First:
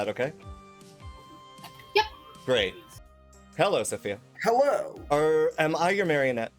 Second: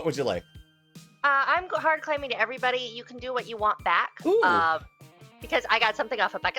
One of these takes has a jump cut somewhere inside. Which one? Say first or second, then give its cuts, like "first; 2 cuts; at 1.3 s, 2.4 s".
first; 1 cut; at 3.0 s